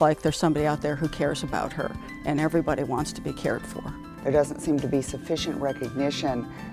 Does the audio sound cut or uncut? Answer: cut